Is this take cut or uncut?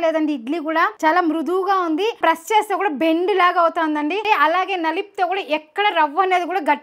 cut